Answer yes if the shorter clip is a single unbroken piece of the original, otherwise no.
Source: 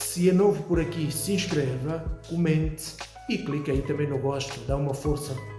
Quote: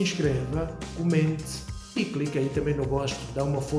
yes